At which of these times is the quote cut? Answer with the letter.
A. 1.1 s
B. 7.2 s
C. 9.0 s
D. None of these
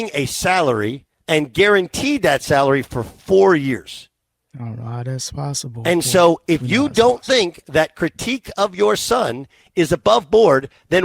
A